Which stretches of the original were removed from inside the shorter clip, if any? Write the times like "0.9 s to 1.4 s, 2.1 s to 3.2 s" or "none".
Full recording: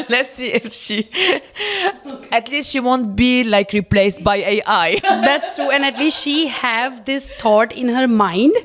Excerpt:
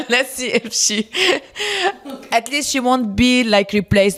none

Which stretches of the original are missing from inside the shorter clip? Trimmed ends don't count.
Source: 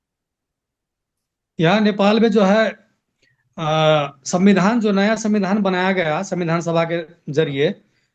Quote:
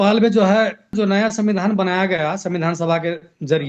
2.9 s to 4.8 s

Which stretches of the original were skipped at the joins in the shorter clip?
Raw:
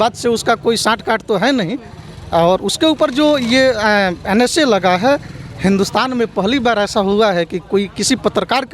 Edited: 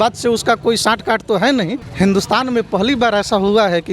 1.8 s to 5.5 s

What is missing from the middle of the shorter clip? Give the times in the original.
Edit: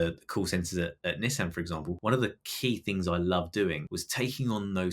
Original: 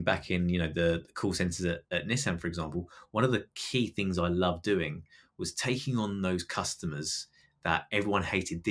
2.8 s to 3.1 s, 5.1 s to 5.4 s

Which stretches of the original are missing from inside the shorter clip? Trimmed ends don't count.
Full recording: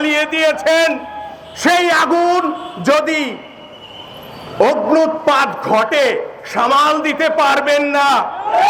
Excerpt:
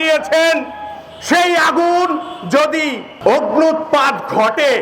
3.4 s to 4.4 s

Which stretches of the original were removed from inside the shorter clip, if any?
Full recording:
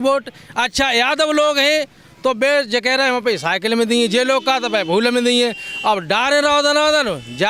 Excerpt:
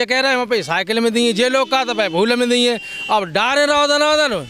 none

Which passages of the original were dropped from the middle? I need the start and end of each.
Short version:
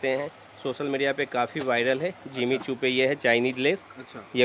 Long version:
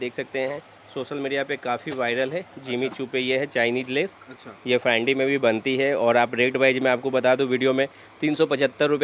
none

